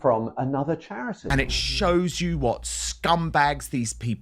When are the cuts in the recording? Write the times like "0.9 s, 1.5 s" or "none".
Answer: 1.2 s